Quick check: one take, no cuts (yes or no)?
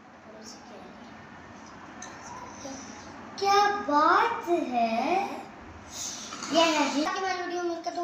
no